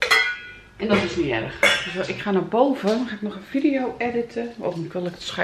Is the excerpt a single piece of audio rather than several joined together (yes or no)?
no